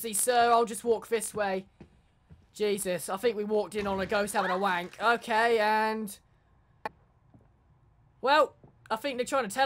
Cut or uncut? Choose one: uncut